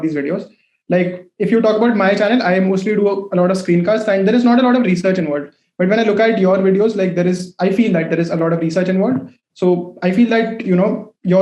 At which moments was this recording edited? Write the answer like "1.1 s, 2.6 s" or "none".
none